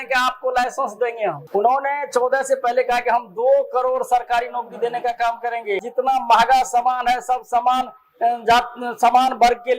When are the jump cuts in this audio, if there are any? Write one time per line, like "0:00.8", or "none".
0:01.4
0:05.8